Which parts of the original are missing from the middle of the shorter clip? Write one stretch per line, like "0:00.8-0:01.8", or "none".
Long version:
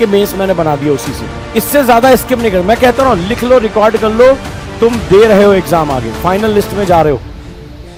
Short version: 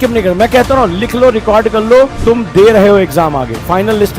0:04.4-0:04.7